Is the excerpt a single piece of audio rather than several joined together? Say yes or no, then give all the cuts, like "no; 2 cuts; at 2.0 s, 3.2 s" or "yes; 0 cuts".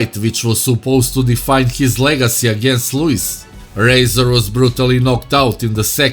yes; 0 cuts